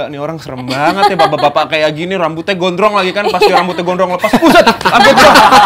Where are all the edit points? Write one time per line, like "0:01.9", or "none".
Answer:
none

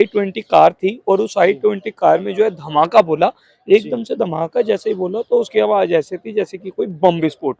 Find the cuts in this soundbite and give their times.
none

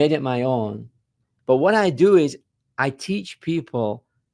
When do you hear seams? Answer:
0:01.3

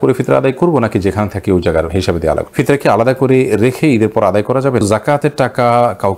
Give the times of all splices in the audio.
0:02.5
0:04.8

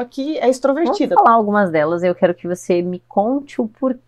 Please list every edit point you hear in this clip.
0:01.2

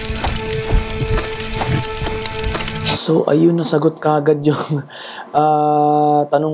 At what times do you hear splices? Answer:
none

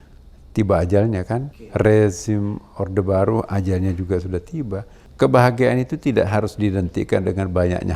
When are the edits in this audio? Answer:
0:01.6
0:05.0

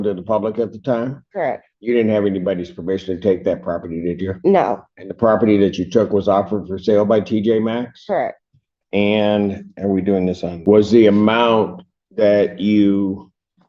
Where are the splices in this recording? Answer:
0:10.5

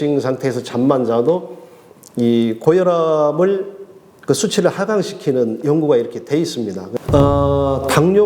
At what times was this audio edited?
0:06.9

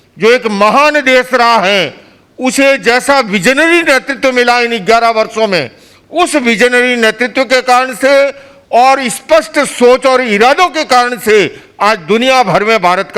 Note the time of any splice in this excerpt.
none

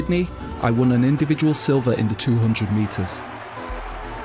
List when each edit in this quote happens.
0:02.2

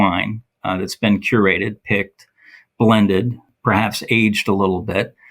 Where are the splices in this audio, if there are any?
0:03.5

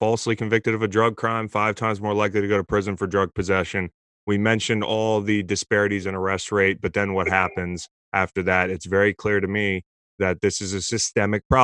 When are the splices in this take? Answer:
none

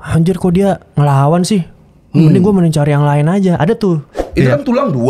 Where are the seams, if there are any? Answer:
0:04.2

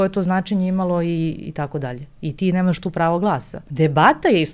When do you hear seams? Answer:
0:03.6

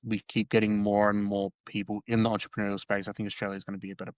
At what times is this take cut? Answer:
0:01.6

